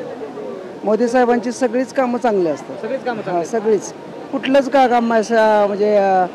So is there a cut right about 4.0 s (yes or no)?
no